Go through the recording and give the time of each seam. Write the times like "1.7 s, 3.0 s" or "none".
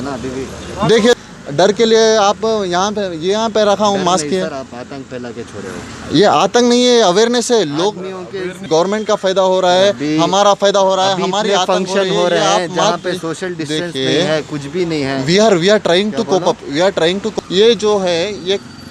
1.2 s, 8.5 s, 17.4 s

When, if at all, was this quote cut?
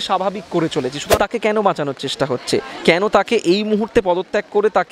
1.1 s

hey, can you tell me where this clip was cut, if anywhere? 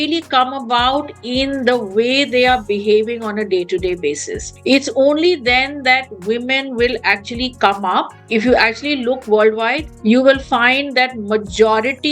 8.2 s

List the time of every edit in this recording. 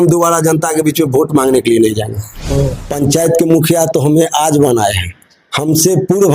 2.3 s

